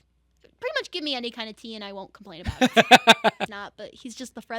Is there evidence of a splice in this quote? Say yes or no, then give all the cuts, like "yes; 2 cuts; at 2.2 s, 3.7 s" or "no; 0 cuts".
yes; 1 cut; at 3.5 s